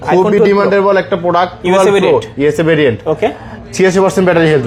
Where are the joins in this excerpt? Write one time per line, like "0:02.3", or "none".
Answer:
none

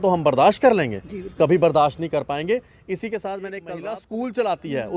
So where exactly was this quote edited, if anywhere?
0:03.6

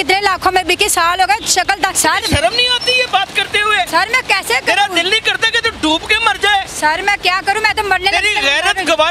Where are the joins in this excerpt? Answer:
0:01.9
0:03.9

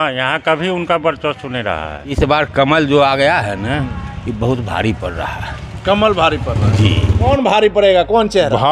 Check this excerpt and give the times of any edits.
0:02.2
0:07.3

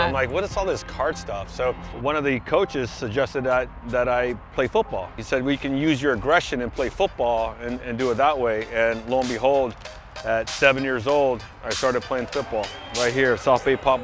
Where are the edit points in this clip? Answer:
0:01.9
0:05.2

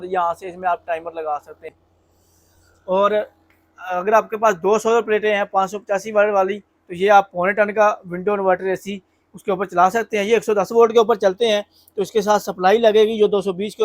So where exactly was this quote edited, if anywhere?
0:01.7

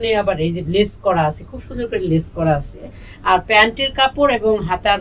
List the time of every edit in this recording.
none

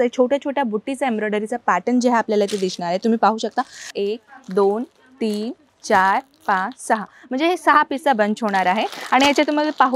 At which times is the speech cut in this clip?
0:03.9

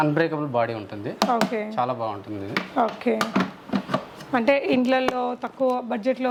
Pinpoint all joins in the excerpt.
none

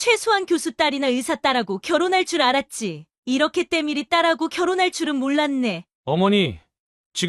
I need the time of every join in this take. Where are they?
none

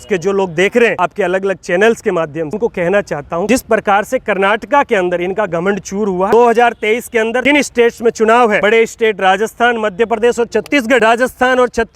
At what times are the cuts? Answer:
0:01.0
0:02.6
0:03.5
0:06.3
0:07.4
0:08.6
0:11.0

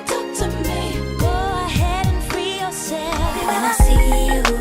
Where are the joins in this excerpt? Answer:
0:03.4

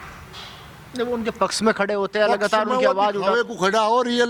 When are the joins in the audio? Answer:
none

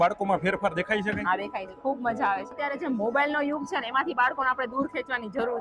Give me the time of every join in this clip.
0:02.6

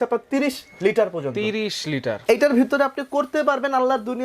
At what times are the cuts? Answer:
0:02.1

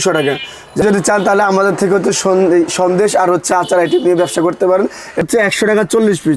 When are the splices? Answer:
0:00.8
0:05.2

